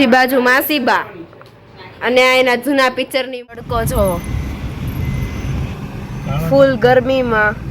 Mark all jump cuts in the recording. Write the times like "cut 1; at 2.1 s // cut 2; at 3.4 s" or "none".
cut 1; at 3.3 s